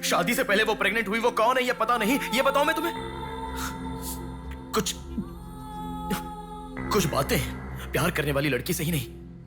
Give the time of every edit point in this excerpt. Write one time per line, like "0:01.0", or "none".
none